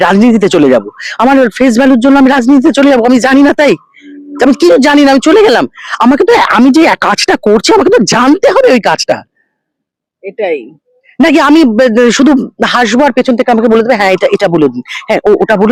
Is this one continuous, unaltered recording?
yes; 0 cuts

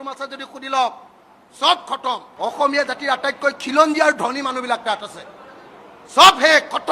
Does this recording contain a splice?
yes; 1 cut; at 2.3 s

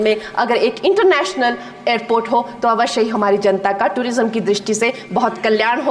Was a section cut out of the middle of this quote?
no; 0 cuts

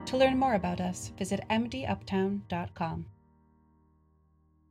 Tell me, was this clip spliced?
yes; 1 cut; at 3.0 s

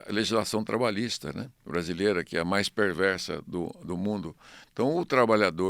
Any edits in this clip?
yes; 1 cut; at 1.5 s

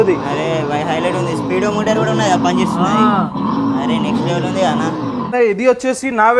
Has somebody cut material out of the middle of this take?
yes; 1 cut; at 5.3 s

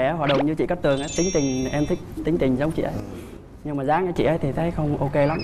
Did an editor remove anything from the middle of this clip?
no; 0 cuts

